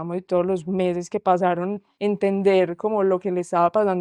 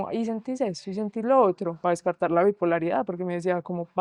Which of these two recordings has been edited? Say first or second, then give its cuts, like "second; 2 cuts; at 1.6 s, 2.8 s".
first; 1 cut; at 1.8 s